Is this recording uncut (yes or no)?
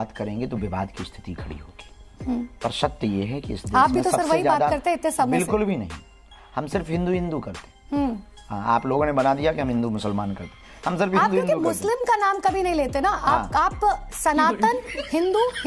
yes